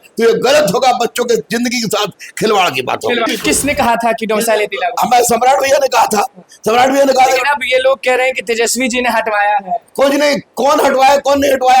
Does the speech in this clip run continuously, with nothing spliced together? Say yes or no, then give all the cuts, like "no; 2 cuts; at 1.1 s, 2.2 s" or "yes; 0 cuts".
no; 1 cut; at 3.3 s